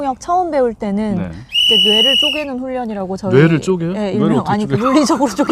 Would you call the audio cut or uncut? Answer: uncut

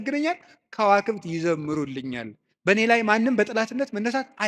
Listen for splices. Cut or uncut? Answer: uncut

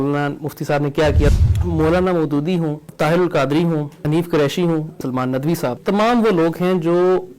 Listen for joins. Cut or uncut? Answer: cut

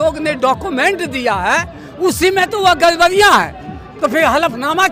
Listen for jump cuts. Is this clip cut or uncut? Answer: uncut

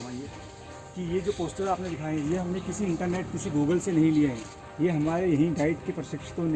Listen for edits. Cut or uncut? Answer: uncut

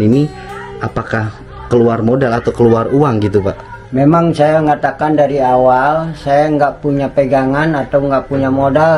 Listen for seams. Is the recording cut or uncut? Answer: uncut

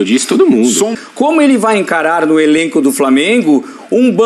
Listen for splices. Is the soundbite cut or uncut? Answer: cut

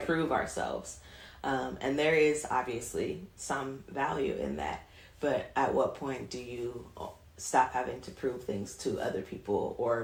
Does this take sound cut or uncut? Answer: uncut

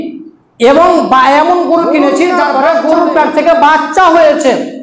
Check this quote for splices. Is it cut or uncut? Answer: cut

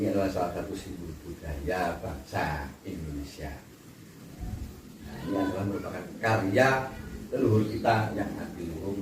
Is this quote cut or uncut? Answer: uncut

